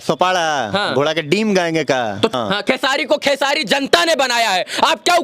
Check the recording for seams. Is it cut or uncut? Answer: cut